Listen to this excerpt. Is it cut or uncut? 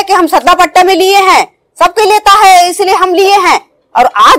uncut